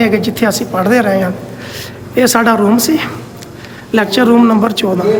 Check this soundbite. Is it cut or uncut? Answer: uncut